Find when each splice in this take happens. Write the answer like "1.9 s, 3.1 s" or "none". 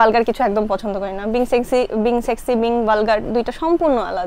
none